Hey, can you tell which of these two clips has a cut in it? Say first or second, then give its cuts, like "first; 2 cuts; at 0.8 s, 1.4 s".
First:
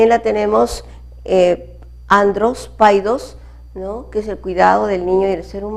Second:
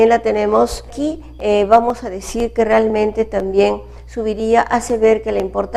first; 1 cut; at 0.9 s